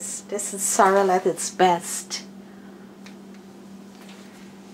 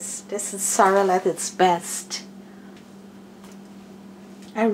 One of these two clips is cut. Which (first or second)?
second